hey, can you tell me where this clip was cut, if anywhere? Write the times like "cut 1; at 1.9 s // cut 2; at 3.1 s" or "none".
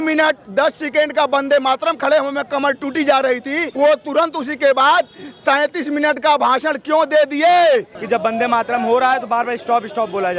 cut 1; at 3.7 s // cut 2; at 7.9 s